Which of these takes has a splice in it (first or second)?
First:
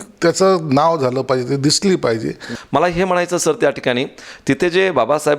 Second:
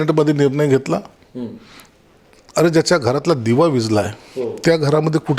first